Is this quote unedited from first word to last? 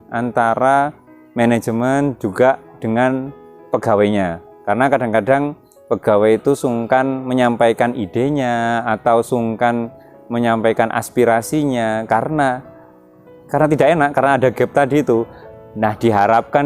no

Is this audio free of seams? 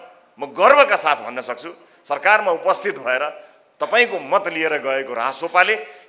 yes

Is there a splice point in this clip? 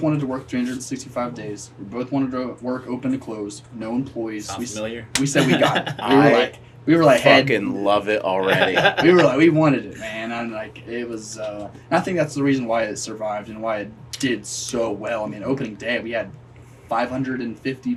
no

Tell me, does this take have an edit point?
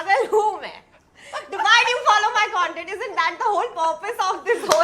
no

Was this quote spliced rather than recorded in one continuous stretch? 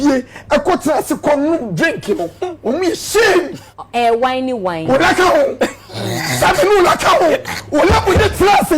yes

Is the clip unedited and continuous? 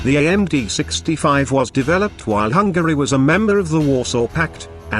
no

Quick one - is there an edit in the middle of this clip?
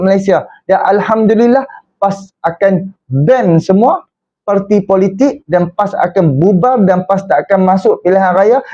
no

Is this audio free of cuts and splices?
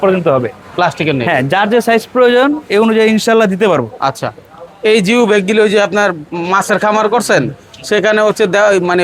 yes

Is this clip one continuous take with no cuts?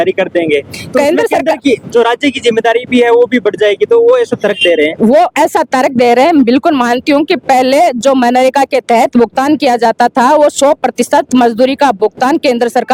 yes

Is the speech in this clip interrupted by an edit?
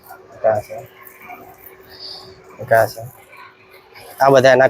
no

